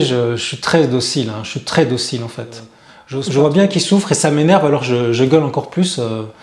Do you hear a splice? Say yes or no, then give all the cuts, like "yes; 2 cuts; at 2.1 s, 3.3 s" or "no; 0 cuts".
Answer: no; 0 cuts